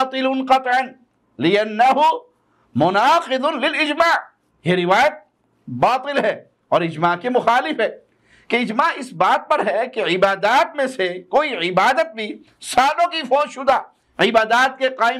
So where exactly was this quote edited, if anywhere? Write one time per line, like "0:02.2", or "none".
none